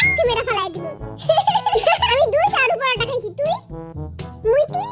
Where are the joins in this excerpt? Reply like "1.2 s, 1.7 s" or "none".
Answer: 2.1 s